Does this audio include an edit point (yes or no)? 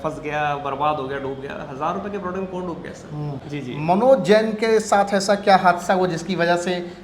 yes